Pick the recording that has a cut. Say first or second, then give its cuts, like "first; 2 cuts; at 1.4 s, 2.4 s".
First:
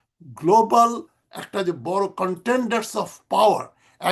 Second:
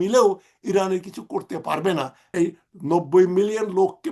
second; 1 cut; at 2.2 s